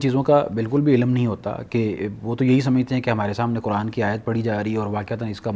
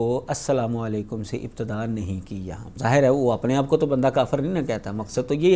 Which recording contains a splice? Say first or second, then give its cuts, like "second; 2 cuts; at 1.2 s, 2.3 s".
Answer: second; 1 cut; at 2.7 s